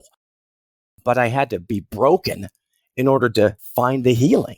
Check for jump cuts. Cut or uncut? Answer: cut